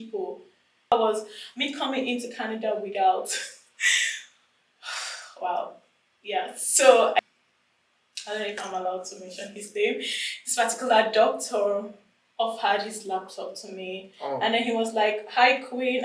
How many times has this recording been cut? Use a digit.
2